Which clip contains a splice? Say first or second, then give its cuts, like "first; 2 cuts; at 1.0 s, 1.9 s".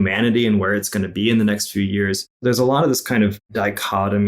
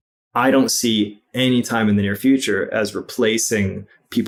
first; 2 cuts; at 2.3 s, 3.5 s